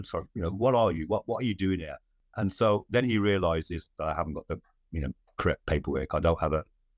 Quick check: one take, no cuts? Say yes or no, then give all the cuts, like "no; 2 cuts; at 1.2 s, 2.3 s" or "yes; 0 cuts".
no; 1 cut; at 2.2 s